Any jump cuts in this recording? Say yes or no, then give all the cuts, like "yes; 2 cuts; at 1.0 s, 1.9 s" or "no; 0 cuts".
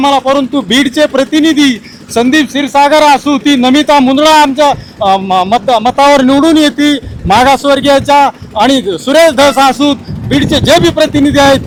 no; 0 cuts